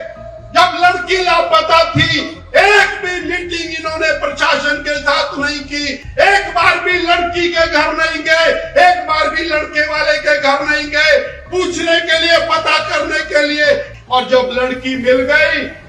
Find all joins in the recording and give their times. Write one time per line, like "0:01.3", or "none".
0:06.0
0:13.9